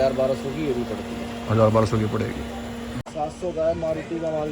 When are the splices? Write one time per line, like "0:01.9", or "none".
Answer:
0:02.9